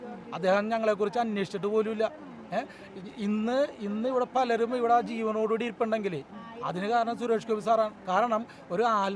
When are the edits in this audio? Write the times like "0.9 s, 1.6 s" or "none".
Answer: none